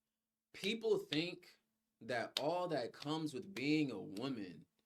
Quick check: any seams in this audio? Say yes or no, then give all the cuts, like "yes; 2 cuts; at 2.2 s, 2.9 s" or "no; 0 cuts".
no; 0 cuts